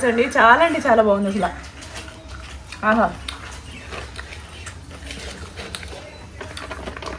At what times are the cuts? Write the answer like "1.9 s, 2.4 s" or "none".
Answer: none